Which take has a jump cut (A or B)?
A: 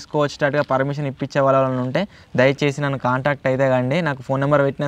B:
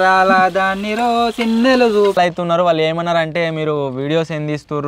B